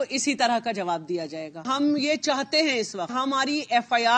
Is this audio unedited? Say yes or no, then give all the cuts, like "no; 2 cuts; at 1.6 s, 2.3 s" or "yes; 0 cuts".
no; 2 cuts; at 1.7 s, 3.1 s